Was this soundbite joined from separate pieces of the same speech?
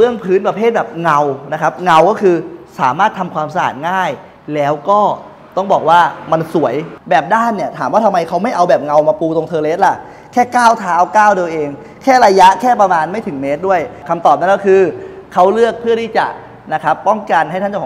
yes; 2 cuts; at 6.9 s, 14.0 s

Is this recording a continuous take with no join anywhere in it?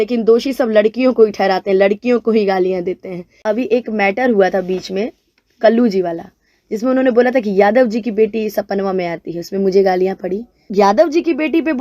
no; 2 cuts; at 3.3 s, 10.6 s

